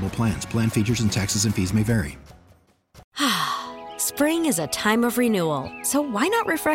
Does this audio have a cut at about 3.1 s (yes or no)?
yes